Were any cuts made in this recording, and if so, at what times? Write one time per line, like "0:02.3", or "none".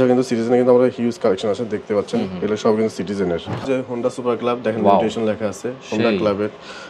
0:03.6